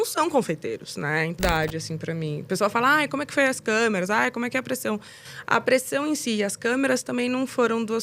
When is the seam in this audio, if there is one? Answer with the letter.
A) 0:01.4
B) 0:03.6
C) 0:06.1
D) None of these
A